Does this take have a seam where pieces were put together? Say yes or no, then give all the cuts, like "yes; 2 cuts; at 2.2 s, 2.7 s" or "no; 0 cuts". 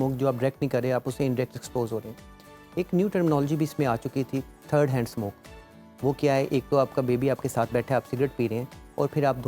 no; 0 cuts